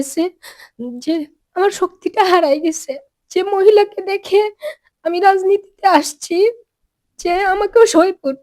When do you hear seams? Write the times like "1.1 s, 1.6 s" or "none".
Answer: 1.4 s

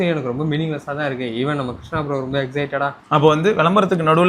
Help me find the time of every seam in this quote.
3.0 s

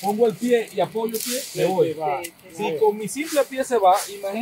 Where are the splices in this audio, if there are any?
none

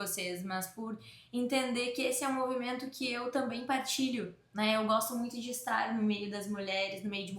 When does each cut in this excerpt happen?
none

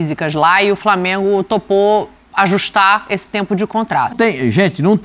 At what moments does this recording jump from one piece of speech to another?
4.1 s

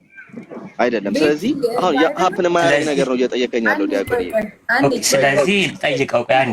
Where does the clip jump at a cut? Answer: none

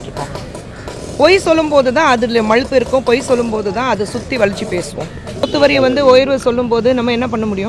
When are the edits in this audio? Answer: 5.5 s

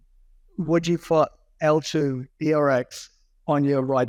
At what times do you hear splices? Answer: none

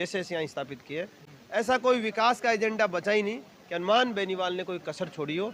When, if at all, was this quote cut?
none

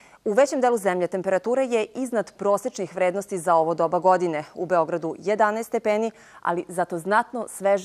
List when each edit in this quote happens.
1.9 s

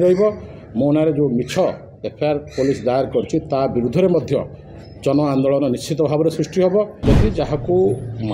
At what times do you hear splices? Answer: 7.0 s

